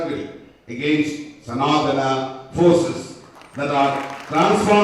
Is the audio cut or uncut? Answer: uncut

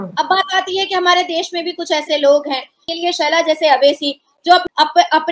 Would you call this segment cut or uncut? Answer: cut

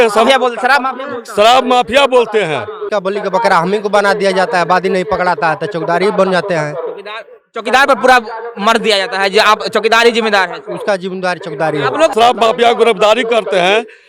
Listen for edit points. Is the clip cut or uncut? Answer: cut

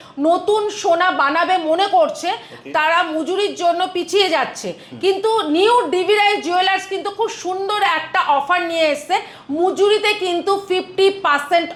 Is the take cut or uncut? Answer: uncut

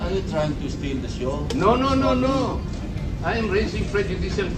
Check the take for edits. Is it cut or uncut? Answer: uncut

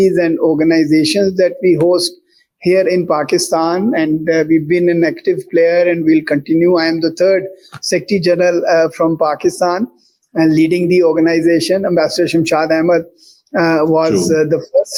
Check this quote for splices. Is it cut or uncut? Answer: uncut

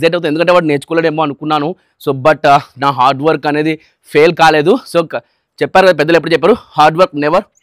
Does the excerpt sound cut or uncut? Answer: uncut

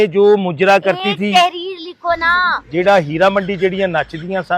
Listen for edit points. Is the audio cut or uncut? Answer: cut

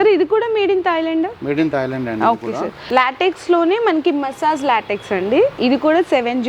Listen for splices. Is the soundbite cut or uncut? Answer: cut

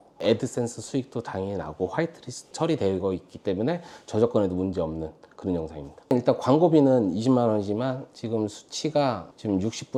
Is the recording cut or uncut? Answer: uncut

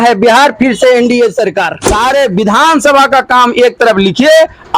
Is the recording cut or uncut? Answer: cut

